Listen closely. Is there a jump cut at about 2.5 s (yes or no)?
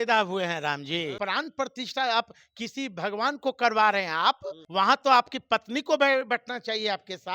no